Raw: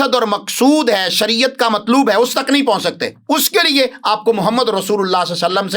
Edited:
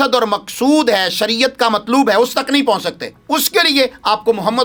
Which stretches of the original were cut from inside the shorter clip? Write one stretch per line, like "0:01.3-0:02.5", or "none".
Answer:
none

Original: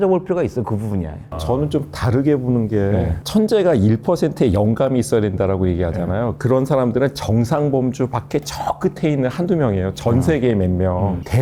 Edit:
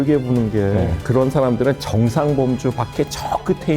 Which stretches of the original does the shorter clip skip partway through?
0:03.2-0:06.4

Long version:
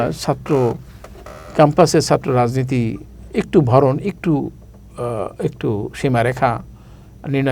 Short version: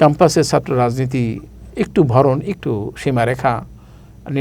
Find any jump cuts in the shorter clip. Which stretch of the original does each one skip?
0:04.2-0:05.6

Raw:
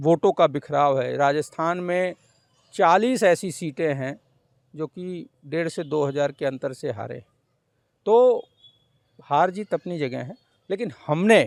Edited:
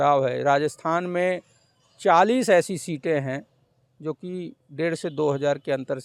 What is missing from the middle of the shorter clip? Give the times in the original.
none

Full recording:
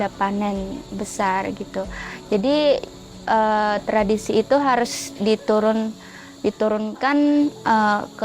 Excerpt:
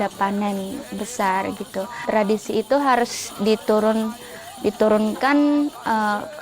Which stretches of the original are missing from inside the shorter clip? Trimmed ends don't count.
0:02.0-0:03.8

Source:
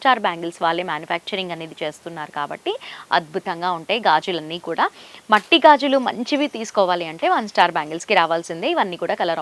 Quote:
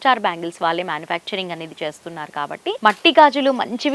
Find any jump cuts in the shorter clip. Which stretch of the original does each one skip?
0:02.8-0:05.2

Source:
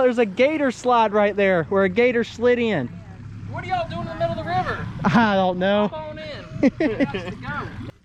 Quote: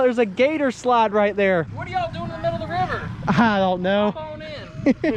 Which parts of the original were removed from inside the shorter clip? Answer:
0:01.7-0:03.4

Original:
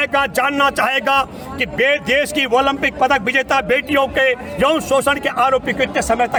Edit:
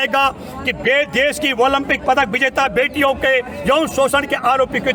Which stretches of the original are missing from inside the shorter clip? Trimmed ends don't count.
none

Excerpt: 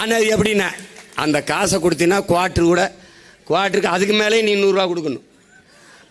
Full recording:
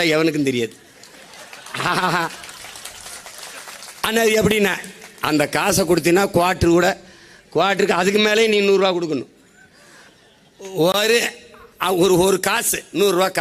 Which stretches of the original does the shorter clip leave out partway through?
none

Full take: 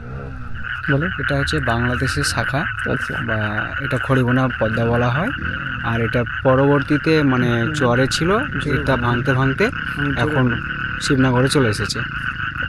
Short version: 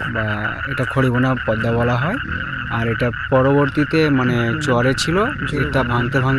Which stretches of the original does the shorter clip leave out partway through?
none

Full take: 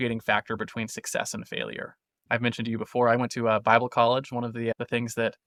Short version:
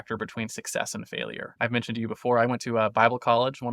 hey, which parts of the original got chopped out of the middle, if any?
0:01.8-0:02.2

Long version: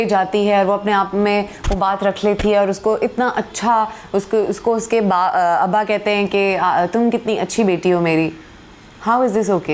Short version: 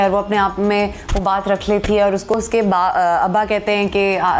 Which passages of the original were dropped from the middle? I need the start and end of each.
0:02.9-0:04.7

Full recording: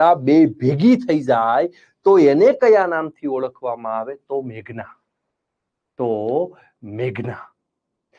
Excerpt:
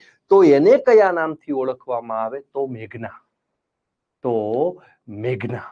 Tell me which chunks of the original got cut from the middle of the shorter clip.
none

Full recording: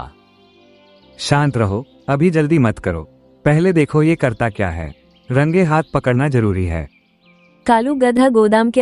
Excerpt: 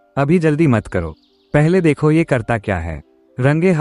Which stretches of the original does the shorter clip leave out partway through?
none

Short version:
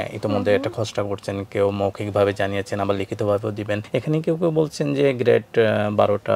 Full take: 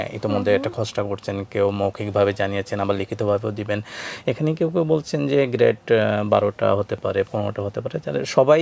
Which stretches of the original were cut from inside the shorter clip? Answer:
0:03.8-0:04.2

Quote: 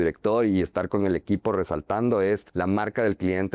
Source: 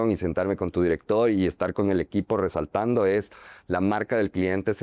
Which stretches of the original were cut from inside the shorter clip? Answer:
0:03.3-0:03.6

